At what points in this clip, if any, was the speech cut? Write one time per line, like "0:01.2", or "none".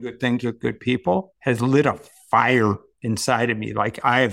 0:01.3

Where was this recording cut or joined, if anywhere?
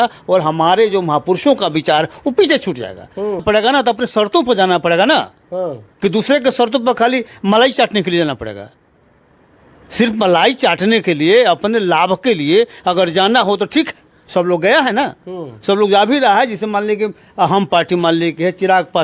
0:03.4

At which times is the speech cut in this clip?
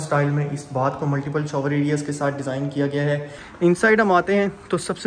0:03.4

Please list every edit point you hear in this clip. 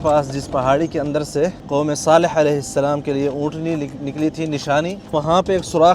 0:01.6
0:05.0

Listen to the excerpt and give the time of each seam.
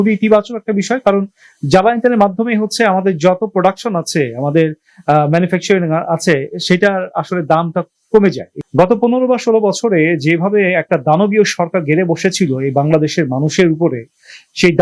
0:08.5

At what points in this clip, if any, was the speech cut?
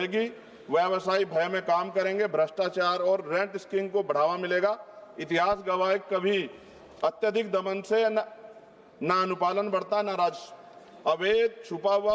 none

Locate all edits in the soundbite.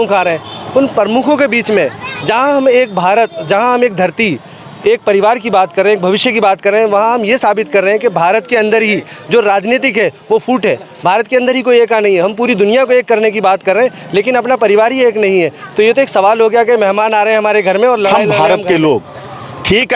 0:18.3

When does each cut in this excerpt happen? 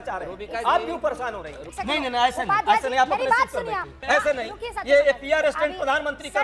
0:01.7
0:03.9

